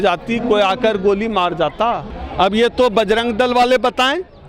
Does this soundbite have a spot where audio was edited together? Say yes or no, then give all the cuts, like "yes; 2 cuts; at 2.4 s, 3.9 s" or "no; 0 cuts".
yes; 1 cut; at 2.1 s